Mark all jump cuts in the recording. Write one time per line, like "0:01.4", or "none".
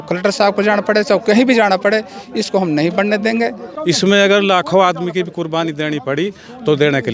0:03.7